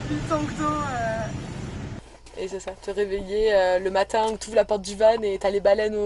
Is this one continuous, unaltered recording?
no; 1 cut; at 2.0 s

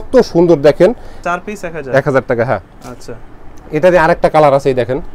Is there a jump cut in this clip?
no; 0 cuts

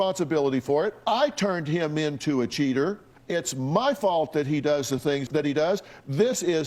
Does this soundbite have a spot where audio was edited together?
yes; 1 cut; at 3.1 s

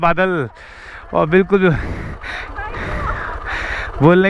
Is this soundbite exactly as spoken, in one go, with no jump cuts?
yes; 0 cuts

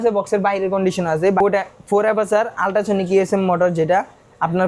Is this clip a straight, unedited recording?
no; 1 cut; at 1.4 s

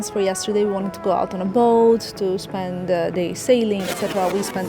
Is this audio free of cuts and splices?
yes; 0 cuts

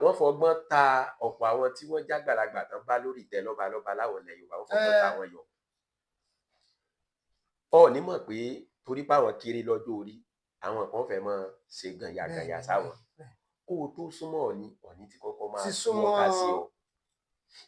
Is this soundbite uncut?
yes; 0 cuts

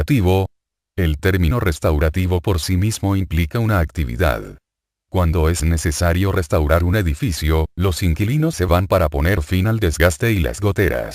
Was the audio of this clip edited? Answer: yes; 1 cut; at 3.7 s

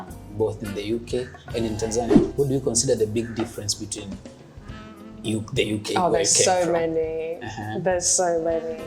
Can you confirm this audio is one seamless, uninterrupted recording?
no; 1 cut; at 2.2 s

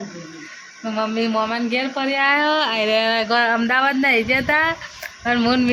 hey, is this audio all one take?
yes; 0 cuts

